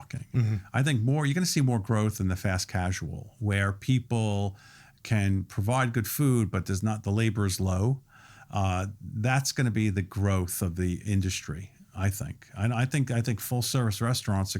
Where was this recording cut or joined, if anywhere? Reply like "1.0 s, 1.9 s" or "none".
none